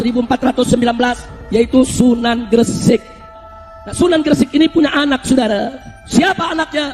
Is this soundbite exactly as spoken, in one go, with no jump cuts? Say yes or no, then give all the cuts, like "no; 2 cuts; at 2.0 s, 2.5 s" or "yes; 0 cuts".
yes; 0 cuts